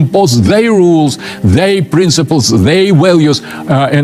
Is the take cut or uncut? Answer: uncut